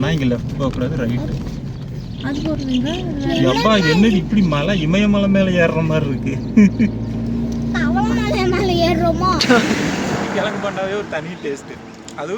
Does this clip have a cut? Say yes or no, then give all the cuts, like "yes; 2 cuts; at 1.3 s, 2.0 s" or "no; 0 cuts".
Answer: yes; 1 cut; at 9.4 s